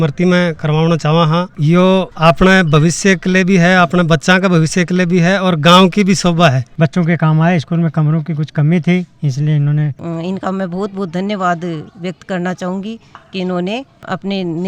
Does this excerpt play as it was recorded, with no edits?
no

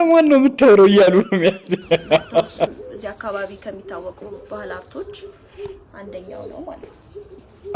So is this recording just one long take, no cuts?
no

